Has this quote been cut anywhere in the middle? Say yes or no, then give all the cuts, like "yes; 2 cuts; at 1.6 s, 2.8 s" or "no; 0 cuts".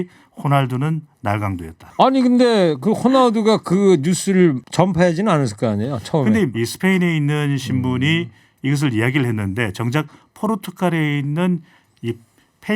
yes; 3 cuts; at 1.8 s, 4.6 s, 6.5 s